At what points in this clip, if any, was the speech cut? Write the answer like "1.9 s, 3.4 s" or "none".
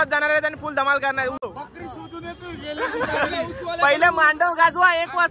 1.5 s

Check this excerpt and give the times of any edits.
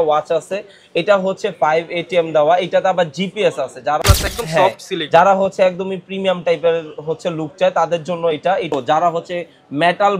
4.0 s, 8.7 s

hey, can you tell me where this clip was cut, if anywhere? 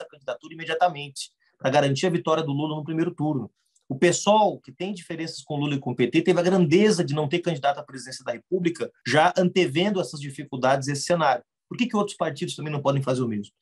8.9 s

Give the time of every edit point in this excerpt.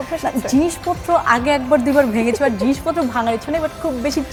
none

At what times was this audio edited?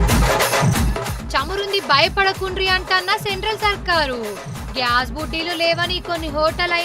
1.1 s

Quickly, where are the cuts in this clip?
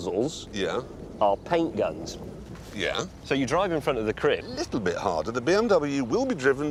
none

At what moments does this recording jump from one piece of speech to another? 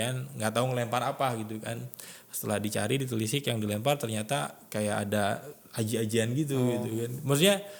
none

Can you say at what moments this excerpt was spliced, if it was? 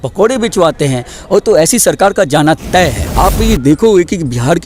3.0 s

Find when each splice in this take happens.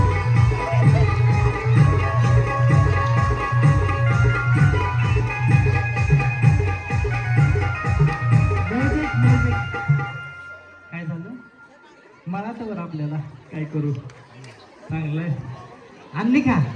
none

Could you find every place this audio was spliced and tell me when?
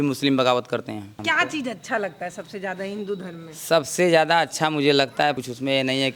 1.2 s, 5.4 s

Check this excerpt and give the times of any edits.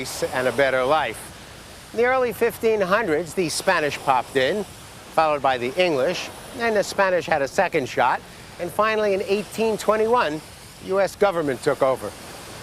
5.2 s

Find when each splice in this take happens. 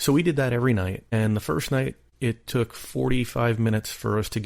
1.0 s, 2.0 s

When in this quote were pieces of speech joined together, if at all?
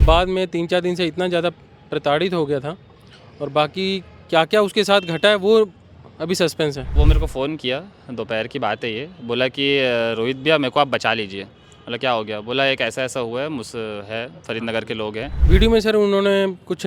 7.0 s, 15.4 s

